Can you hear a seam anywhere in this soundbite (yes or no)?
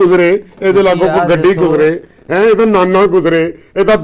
no